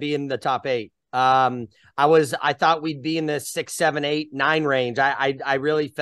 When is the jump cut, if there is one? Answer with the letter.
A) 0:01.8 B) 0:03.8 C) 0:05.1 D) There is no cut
D